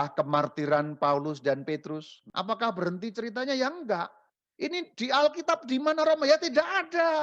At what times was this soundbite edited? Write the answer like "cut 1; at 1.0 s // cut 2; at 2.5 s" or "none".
cut 1; at 2.2 s